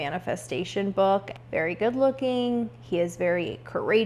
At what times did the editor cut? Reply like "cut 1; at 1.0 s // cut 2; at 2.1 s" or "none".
cut 1; at 1.3 s